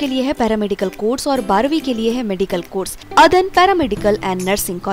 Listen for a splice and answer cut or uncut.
cut